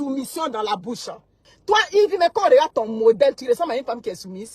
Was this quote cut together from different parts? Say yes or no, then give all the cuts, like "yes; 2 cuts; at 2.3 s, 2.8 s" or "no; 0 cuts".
yes; 1 cut; at 1.5 s